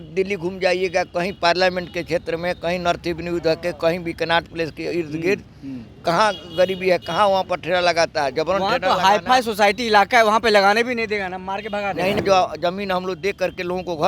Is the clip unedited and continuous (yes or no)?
no